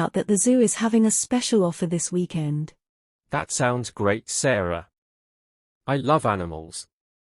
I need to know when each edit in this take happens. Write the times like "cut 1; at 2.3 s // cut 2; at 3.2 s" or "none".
cut 1; at 2.5 s